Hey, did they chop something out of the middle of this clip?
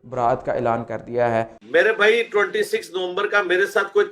no; 0 cuts

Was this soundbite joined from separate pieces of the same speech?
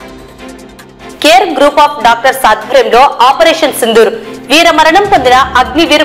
no; 0 cuts

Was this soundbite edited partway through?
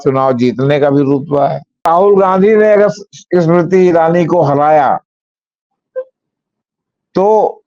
yes; 1 cut; at 1.9 s

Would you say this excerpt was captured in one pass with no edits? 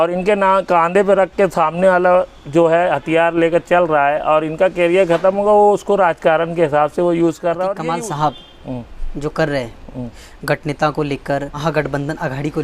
no; 2 cuts; at 7.8 s, 11.5 s

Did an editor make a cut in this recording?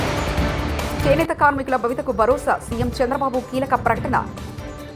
yes; 1 cut; at 1.0 s

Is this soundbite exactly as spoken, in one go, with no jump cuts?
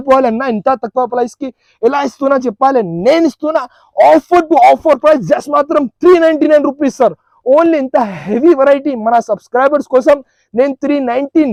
yes; 0 cuts

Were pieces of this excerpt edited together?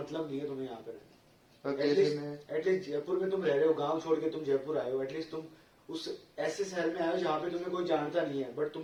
no; 0 cuts

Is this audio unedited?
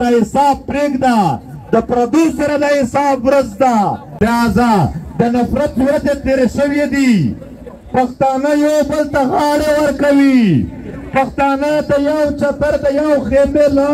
no; 1 cut; at 4.2 s

